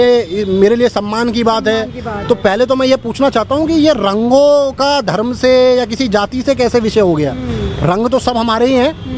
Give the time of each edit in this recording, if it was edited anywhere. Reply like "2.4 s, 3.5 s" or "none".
none